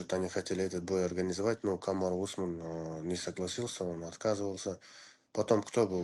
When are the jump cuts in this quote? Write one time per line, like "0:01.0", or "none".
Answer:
none